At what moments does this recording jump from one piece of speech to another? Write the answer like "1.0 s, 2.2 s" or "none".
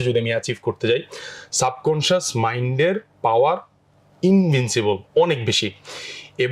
none

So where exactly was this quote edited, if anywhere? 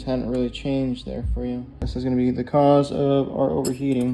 1.7 s

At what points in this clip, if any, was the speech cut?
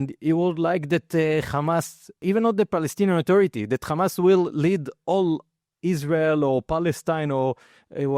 2.2 s

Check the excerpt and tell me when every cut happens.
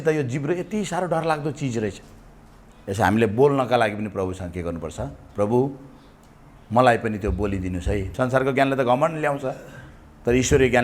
8.1 s

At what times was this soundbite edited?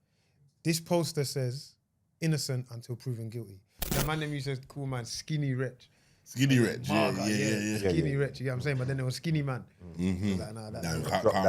3.9 s

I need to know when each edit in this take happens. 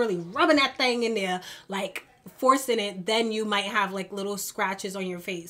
none

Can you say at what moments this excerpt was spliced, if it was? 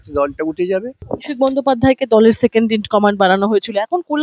1.0 s

